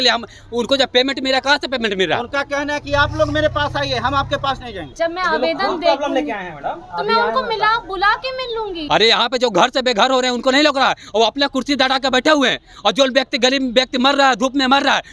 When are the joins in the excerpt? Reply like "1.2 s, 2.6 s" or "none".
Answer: 4.8 s, 8.8 s